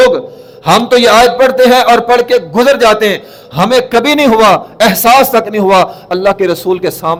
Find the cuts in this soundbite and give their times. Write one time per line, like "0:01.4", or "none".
none